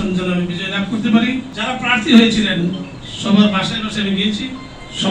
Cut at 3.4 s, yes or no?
no